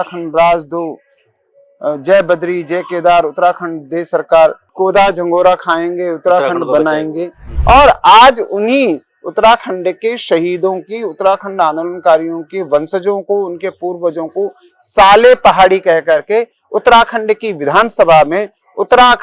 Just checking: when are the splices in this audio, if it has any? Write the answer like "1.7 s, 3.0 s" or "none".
7.5 s